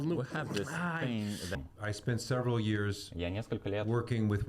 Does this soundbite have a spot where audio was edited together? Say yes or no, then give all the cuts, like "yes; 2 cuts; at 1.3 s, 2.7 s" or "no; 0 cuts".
yes; 1 cut; at 1.7 s